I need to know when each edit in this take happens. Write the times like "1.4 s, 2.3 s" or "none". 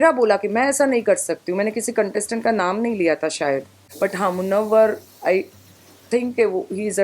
3.8 s